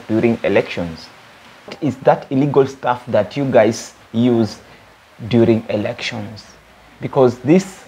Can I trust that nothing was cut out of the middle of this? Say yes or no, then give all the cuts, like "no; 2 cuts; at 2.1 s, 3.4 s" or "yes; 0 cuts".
no; 1 cut; at 1.7 s